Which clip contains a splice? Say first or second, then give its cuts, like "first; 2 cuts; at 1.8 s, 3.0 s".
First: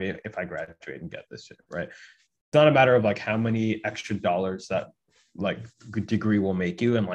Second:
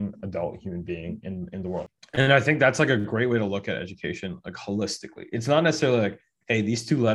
second; 1 cut; at 2.0 s